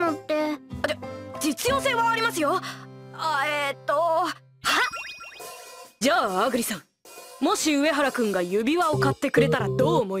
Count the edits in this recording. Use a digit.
1